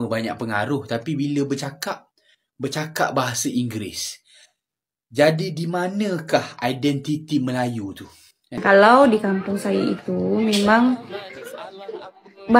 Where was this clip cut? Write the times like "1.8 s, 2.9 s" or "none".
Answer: 8.6 s